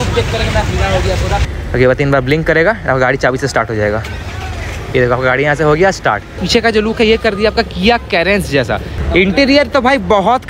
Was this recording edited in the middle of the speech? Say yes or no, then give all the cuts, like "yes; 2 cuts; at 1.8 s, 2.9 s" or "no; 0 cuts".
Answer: yes; 3 cuts; at 1.5 s, 6.4 s, 8.9 s